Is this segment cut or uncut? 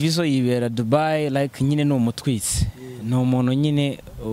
uncut